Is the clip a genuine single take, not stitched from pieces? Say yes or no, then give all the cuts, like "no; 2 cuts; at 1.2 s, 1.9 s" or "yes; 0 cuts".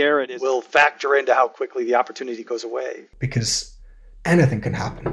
no; 1 cut; at 3.1 s